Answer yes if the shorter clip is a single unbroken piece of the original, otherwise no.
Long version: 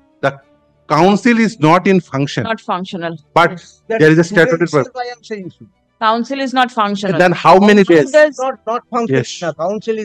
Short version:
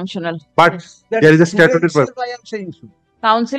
yes